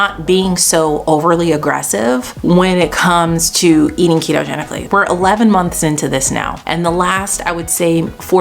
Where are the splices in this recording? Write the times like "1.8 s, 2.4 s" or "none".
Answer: 2.3 s, 4.8 s, 6.6 s